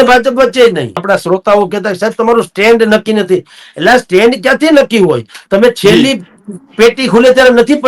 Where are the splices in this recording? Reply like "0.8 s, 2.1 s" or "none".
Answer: 1.0 s